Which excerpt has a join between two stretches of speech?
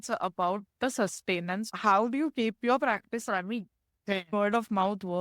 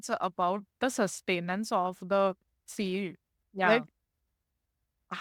first; 2 cuts; at 1.7 s, 4.3 s

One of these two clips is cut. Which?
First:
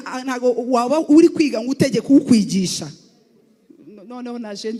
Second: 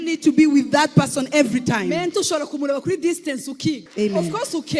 second; 1 cut; at 3.9 s

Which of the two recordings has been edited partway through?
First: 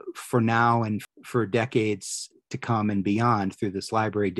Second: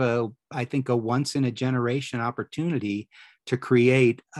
first; 1 cut; at 1.0 s

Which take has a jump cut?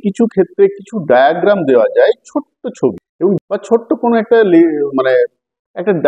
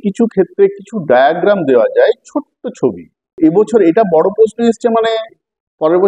second; 1 cut; at 3.3 s

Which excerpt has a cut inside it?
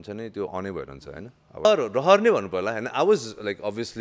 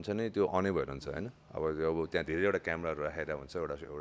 first; 1 cut; at 1.6 s

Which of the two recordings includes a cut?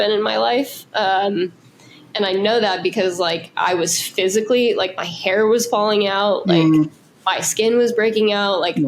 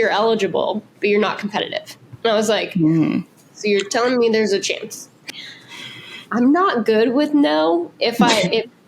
second; 1 cut; at 5.3 s

